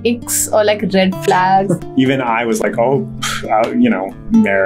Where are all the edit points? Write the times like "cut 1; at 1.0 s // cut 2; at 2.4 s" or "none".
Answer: cut 1; at 1.8 s

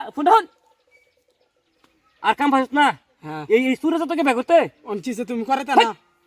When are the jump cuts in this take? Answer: cut 1; at 1.7 s

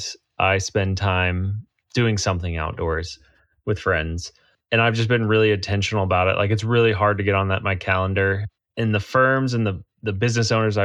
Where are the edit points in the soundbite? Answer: cut 1; at 8.5 s

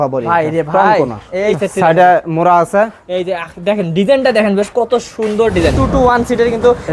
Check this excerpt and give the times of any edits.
cut 1; at 1.5 s // cut 2; at 5.8 s

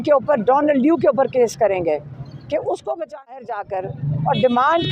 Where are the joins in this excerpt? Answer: cut 1; at 3.4 s

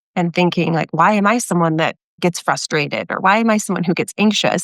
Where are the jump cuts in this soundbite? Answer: cut 1; at 2.2 s

